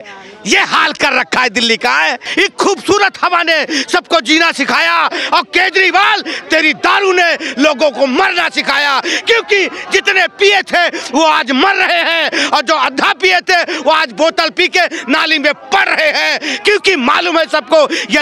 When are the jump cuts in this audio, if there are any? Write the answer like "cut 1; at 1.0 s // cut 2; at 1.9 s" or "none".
cut 1; at 2.2 s